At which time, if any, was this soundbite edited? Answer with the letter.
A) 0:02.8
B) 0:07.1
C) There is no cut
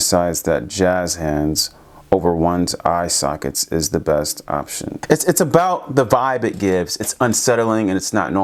C